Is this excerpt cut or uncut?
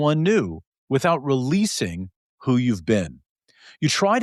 uncut